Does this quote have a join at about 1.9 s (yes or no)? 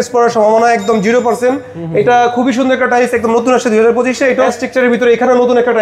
no